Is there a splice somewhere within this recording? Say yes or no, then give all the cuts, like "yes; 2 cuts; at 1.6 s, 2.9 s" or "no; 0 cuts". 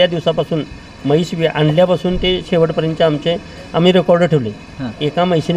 no; 0 cuts